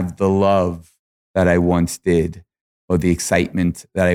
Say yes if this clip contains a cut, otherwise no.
no